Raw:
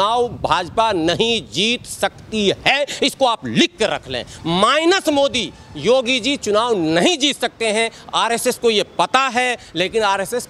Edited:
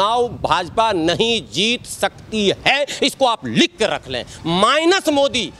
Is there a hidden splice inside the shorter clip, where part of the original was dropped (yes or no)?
no